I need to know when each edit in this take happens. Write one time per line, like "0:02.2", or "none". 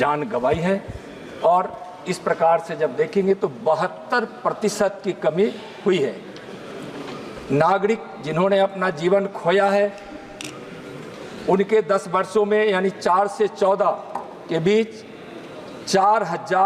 none